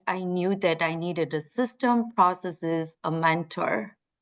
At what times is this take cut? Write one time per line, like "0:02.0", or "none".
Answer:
none